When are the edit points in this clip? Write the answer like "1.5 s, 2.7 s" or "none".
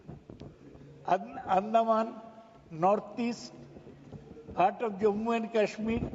none